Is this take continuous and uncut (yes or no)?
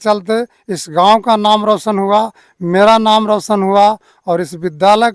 yes